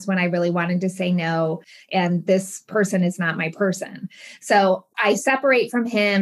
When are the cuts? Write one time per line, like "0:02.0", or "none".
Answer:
0:01.8
0:04.9